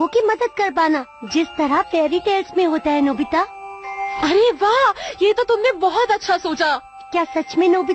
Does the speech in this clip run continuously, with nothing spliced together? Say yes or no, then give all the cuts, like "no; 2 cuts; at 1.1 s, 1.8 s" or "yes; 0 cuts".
no; 1 cut; at 3.7 s